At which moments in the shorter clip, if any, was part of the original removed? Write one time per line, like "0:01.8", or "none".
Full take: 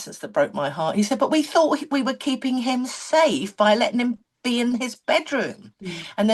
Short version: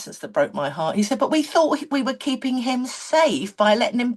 none